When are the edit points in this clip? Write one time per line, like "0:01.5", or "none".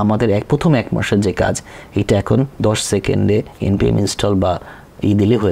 none